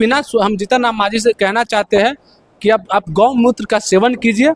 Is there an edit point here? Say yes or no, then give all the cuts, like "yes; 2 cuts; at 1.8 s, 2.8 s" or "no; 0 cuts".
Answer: no; 0 cuts